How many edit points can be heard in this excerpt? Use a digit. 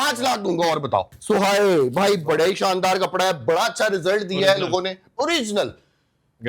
1